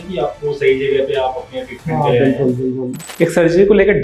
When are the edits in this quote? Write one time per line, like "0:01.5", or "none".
0:03.0